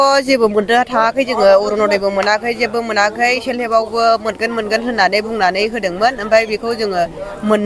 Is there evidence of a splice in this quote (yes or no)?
no